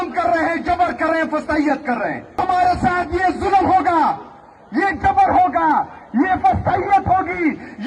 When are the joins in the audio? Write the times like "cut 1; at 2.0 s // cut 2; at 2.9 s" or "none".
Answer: cut 1; at 2.4 s